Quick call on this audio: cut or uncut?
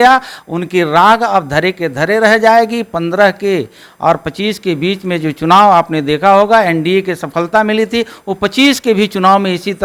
uncut